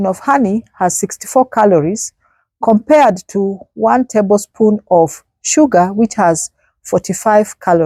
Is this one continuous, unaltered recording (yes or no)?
yes